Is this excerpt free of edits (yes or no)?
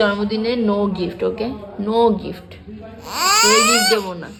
yes